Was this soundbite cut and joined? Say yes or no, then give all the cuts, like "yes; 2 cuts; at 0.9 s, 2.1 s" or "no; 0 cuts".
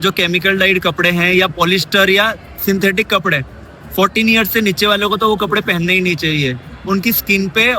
no; 0 cuts